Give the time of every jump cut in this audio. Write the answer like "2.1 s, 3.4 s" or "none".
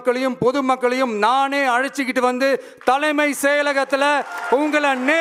none